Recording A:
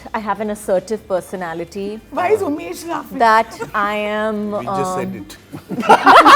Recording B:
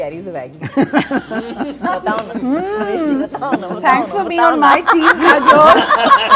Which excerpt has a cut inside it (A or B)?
A